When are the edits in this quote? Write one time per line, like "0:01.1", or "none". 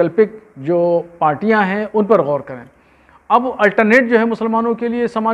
none